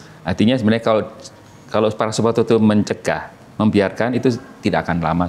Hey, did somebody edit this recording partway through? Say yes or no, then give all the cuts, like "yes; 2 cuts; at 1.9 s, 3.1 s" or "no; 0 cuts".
no; 0 cuts